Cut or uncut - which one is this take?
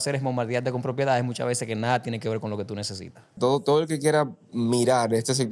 cut